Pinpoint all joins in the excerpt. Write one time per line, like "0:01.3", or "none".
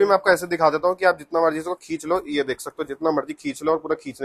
none